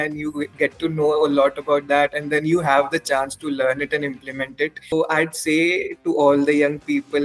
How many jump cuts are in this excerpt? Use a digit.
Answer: 1